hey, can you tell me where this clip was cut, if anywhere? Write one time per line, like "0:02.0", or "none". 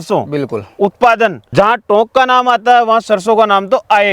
0:01.4